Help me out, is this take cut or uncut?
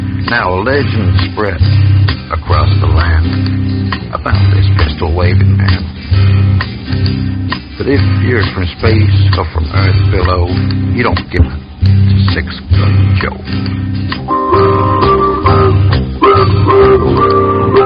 cut